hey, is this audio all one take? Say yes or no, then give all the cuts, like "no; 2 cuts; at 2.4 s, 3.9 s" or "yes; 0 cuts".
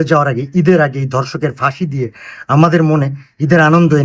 yes; 0 cuts